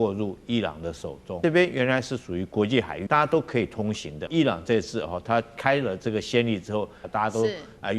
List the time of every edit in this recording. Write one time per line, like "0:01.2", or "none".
0:01.4
0:03.0
0:04.3
0:07.0